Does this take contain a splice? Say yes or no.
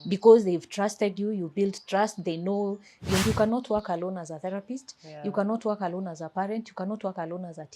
yes